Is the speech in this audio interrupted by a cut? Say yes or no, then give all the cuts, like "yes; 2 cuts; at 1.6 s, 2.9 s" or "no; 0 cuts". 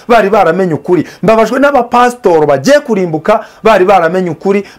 no; 0 cuts